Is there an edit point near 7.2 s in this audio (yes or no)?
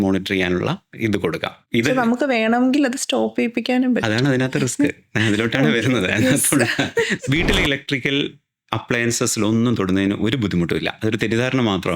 yes